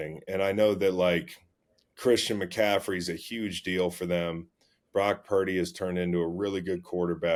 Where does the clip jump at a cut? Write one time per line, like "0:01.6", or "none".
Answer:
none